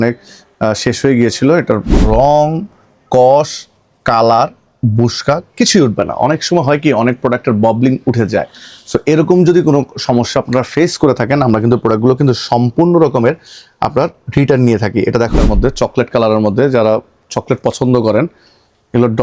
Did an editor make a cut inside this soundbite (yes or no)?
yes